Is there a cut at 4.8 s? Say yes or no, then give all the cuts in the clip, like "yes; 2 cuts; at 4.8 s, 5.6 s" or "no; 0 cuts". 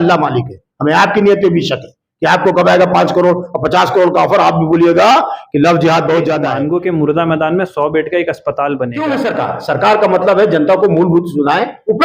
no; 2 cuts; at 6.5 s, 9.0 s